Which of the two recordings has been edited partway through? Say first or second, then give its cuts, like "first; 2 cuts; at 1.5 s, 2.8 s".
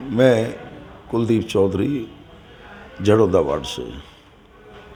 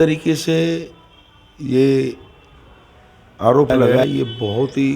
second; 1 cut; at 4.0 s